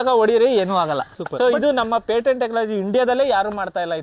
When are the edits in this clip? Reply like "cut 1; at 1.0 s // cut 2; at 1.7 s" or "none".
cut 1; at 1.2 s